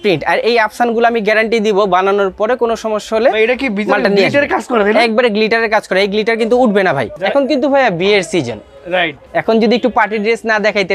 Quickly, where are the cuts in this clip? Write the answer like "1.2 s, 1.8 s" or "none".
7.1 s, 9.2 s